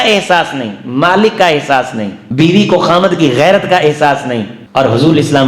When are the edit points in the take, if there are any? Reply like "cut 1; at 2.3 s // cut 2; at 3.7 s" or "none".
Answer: cut 1; at 2.2 s // cut 2; at 4.6 s